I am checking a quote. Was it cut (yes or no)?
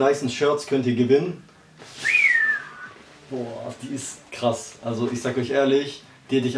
no